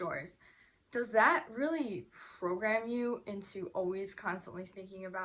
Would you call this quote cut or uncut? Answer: uncut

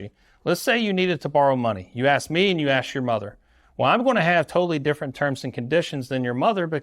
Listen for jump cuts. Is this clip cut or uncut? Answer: uncut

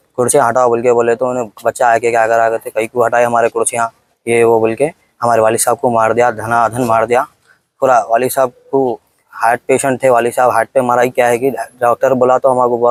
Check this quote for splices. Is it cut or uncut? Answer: uncut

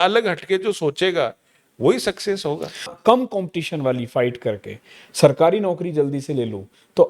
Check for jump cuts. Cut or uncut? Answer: cut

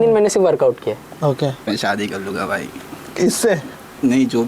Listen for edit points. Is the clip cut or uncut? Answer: cut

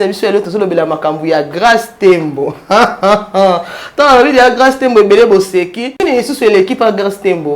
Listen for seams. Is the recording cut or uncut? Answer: cut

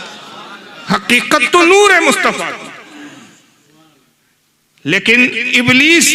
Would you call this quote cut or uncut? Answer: uncut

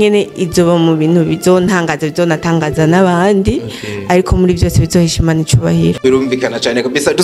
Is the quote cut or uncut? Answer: uncut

